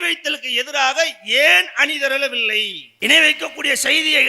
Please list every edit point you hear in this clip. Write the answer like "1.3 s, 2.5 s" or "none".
2.9 s